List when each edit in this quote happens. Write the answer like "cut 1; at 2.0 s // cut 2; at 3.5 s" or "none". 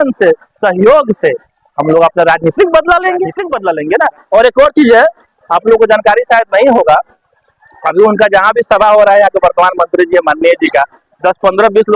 cut 1; at 3.5 s